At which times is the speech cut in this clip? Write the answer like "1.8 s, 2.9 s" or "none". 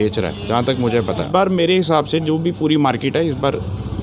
1.3 s